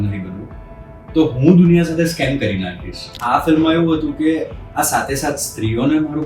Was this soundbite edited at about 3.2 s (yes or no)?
yes